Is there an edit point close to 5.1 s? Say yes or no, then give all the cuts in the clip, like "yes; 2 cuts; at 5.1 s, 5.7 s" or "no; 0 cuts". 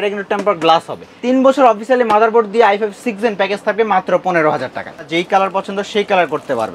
yes; 2 cuts; at 1.1 s, 5.1 s